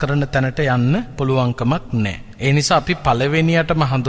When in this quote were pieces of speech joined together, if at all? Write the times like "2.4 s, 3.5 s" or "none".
1.1 s, 2.2 s